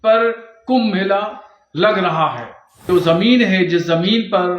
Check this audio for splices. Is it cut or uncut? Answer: cut